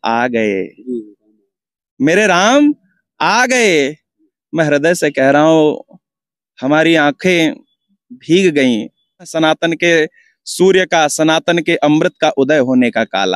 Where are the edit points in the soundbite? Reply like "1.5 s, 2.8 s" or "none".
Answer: 9.3 s